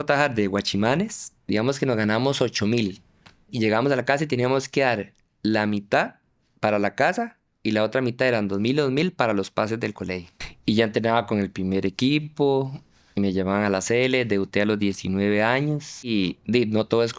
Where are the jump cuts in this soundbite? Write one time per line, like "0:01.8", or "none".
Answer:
0:03.5
0:10.4
0:16.1